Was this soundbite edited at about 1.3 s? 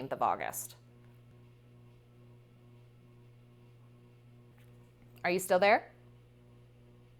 yes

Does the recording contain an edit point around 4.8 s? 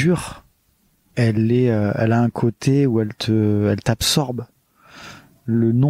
no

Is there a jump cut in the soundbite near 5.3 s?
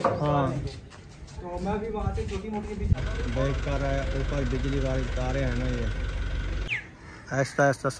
no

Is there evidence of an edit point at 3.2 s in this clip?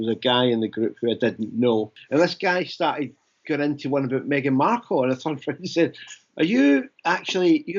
no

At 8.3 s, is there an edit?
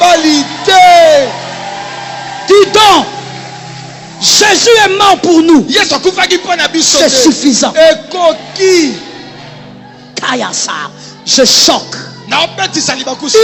no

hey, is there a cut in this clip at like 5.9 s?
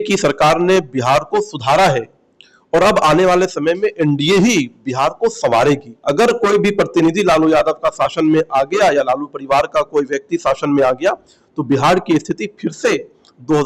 yes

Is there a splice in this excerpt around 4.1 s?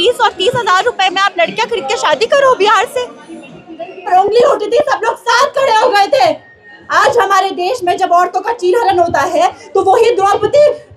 yes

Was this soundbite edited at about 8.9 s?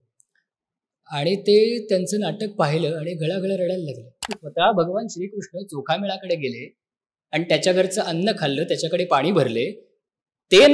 no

